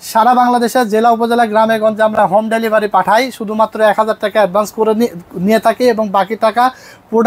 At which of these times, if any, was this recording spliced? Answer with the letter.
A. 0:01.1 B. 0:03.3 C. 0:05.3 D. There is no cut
D